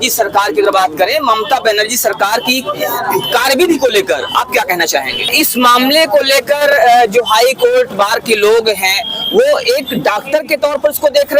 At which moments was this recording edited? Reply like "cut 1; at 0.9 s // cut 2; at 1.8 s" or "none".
cut 1; at 5.3 s